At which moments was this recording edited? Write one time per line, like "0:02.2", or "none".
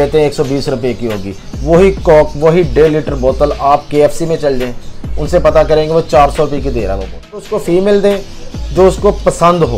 0:07.5